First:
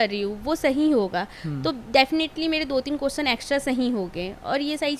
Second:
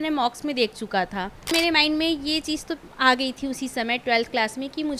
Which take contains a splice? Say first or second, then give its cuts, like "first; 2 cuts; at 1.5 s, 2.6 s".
second; 1 cut; at 1.5 s